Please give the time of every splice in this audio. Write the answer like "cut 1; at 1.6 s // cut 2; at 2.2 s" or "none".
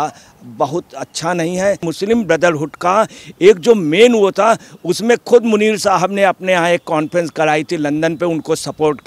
cut 1; at 1.9 s